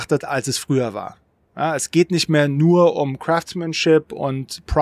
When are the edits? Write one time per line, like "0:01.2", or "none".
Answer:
none